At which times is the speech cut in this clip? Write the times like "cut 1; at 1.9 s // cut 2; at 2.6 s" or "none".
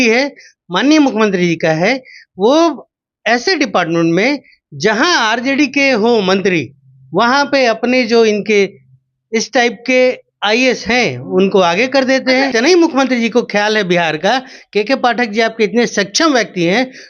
cut 1; at 12.5 s